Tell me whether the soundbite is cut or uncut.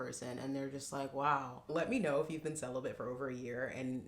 cut